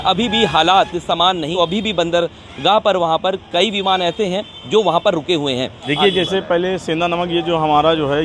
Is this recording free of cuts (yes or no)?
no